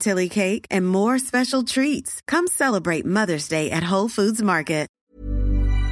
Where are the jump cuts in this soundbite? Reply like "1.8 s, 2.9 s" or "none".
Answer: 4.9 s